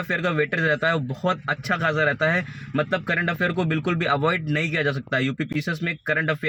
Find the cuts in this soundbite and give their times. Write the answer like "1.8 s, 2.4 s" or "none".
none